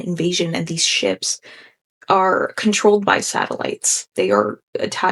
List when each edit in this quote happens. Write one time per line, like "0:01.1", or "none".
0:04.1